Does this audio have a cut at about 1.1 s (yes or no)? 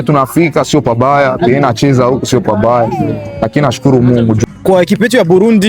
no